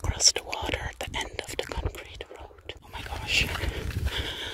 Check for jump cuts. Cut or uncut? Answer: cut